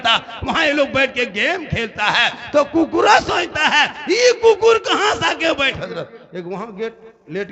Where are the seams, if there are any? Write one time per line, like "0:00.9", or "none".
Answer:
0:05.8